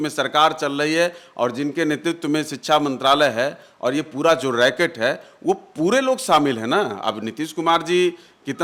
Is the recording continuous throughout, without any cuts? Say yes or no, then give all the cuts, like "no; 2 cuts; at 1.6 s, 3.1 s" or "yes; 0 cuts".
yes; 0 cuts